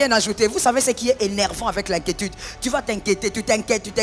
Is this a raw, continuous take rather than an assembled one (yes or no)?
yes